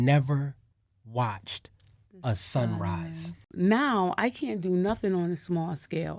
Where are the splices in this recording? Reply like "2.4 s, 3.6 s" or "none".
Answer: 3.5 s